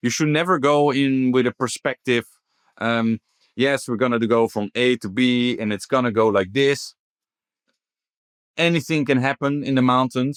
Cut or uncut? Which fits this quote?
uncut